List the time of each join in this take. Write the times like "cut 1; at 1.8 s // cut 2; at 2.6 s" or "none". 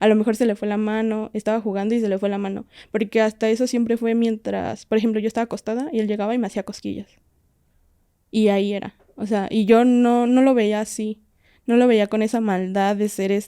none